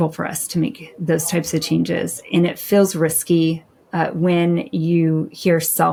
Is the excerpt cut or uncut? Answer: uncut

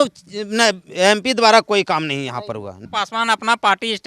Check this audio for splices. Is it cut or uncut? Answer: cut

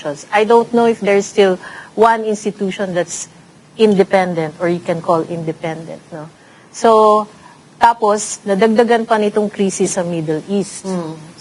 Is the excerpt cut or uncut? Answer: uncut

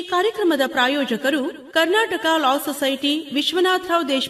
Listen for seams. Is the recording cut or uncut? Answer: cut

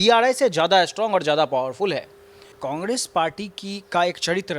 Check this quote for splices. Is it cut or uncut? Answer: cut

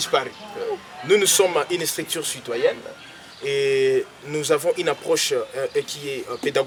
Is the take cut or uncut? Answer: uncut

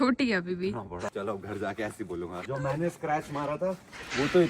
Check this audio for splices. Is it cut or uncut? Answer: cut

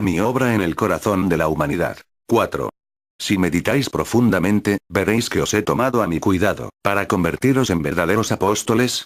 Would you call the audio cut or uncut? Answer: uncut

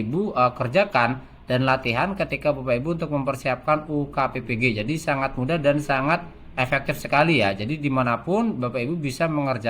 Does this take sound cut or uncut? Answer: uncut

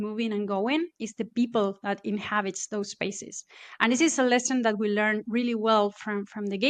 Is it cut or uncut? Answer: uncut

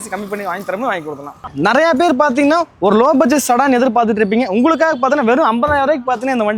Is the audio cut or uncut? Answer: cut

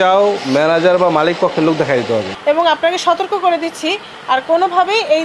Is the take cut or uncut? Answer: cut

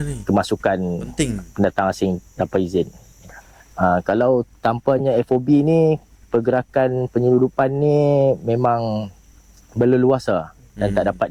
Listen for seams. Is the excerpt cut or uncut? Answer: uncut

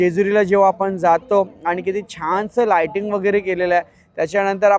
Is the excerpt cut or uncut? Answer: uncut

